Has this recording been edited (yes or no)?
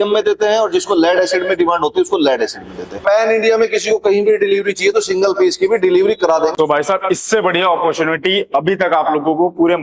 yes